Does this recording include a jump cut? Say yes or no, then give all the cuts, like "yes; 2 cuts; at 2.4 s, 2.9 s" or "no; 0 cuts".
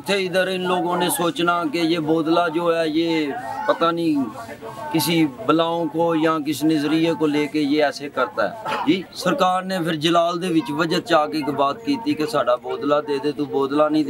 yes; 1 cut; at 9.1 s